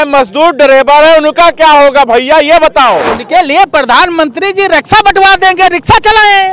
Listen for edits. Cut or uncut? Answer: cut